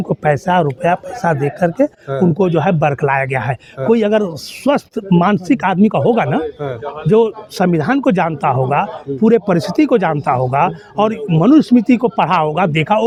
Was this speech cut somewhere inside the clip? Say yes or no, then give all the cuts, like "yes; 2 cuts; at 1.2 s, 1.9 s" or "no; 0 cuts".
no; 0 cuts